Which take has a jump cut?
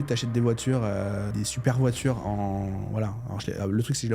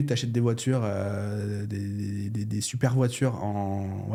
first; 1 cut; at 1.3 s

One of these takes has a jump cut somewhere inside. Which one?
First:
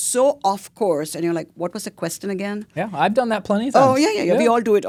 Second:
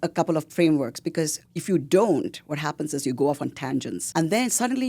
second; 2 cuts; at 1.5 s, 4.0 s

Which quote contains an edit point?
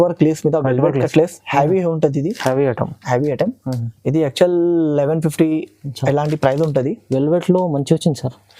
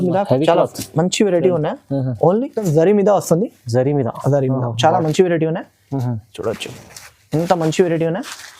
second; 1 cut; at 2.6 s

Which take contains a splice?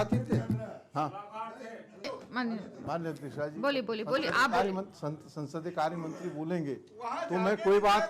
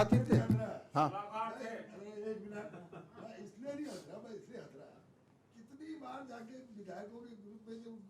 first; 1 cut; at 2.1 s

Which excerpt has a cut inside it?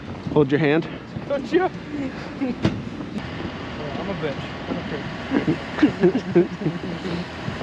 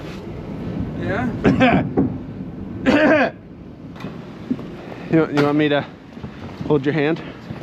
first; 1 cut; at 3.2 s

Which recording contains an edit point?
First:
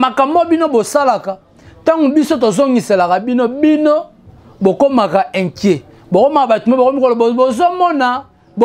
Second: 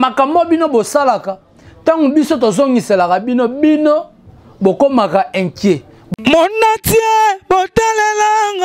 second; 1 cut; at 5.9 s

